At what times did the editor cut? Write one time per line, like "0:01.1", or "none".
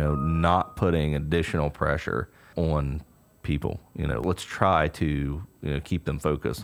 0:02.5
0:04.2